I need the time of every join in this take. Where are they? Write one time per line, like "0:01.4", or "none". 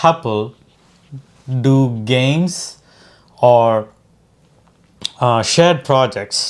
none